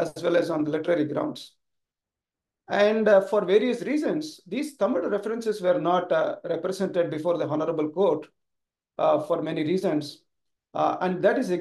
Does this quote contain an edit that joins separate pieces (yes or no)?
no